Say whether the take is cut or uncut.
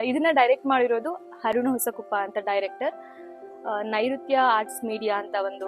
uncut